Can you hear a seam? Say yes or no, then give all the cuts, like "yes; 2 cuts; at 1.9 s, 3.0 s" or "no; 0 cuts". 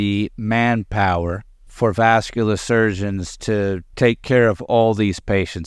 yes; 2 cuts; at 1.7 s, 3.9 s